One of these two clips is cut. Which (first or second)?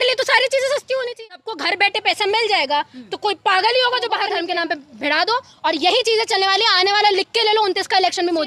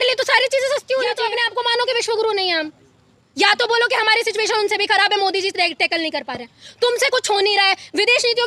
first